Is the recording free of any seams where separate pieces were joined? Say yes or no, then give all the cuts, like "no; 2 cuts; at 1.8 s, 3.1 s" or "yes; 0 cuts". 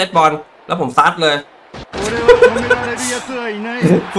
yes; 0 cuts